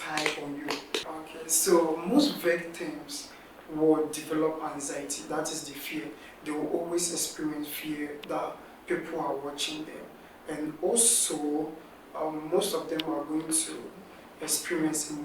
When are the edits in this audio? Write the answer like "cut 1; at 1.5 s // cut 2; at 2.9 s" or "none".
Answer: cut 1; at 1.0 s